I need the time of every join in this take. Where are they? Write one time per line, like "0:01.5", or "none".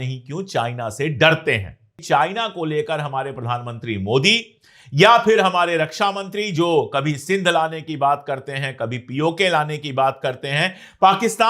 0:02.0